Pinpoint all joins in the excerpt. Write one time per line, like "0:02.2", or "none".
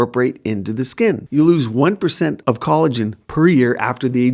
0:01.2
0:02.4